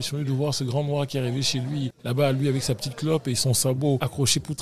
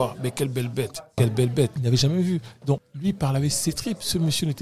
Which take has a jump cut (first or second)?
second